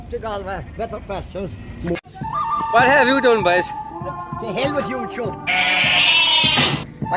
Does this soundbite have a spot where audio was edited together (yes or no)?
yes